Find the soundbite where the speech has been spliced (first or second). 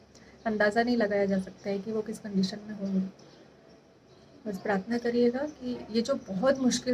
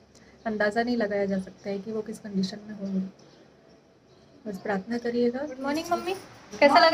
second